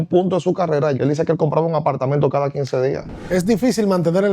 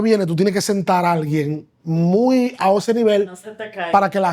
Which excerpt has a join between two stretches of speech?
first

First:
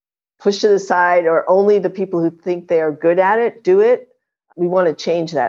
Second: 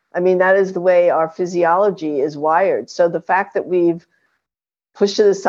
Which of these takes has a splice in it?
first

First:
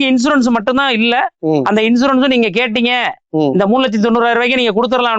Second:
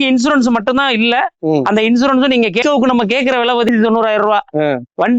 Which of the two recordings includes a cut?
second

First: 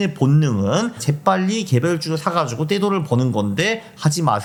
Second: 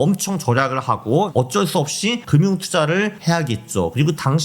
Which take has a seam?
second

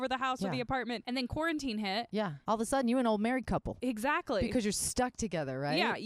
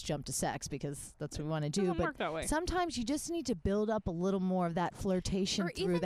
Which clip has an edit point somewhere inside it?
first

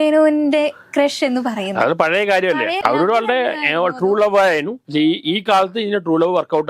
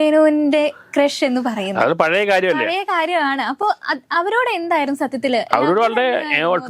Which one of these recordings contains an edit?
first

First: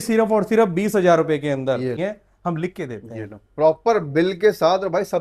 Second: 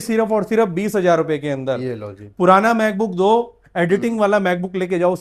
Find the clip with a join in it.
first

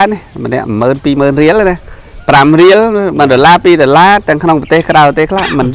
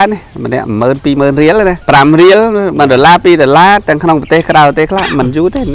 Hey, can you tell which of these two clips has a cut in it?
second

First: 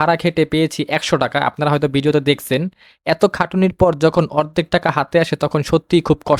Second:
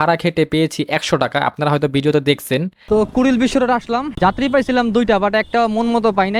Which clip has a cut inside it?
second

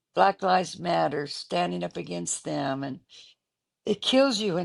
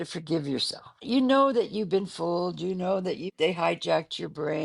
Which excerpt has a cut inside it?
second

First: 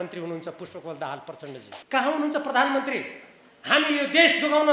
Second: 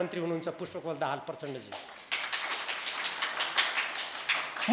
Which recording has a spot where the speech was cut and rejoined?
first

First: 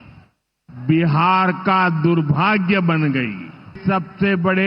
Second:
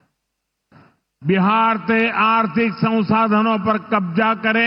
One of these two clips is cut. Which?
first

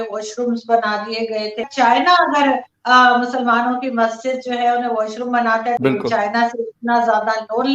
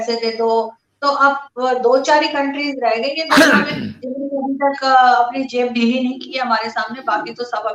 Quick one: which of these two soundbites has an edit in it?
first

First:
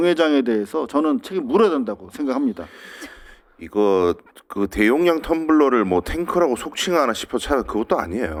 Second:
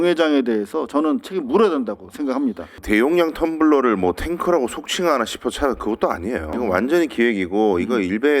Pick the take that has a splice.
second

